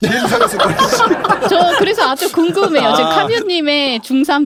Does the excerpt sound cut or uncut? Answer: uncut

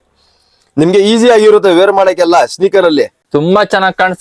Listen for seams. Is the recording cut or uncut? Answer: cut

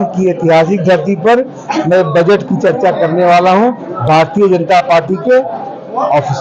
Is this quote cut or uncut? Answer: uncut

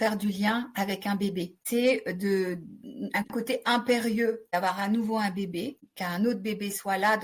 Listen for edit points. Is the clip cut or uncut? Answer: cut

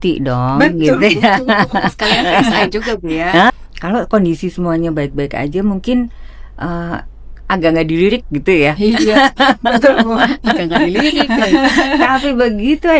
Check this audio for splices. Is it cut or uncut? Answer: cut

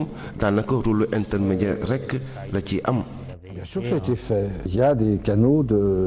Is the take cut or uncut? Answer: cut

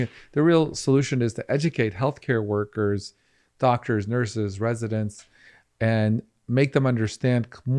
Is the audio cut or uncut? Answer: uncut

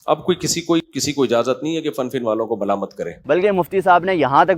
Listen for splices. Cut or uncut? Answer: cut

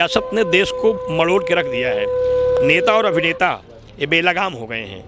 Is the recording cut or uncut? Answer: uncut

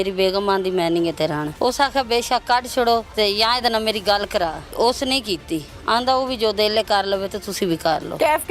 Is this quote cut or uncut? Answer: cut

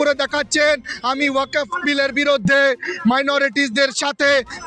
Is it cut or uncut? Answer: uncut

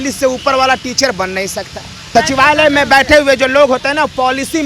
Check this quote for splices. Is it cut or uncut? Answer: cut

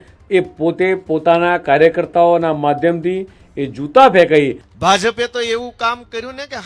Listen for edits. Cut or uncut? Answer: cut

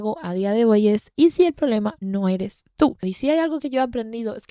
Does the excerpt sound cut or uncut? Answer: cut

